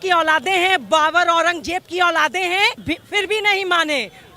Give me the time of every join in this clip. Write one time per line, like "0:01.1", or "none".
0:02.8